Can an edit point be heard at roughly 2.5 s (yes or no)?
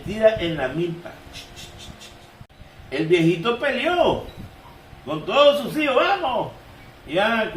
yes